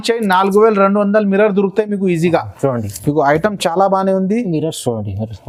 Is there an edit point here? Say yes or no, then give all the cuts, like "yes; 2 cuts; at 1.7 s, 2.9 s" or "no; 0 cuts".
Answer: no; 0 cuts